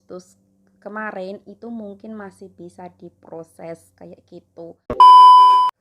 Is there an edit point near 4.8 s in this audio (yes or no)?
yes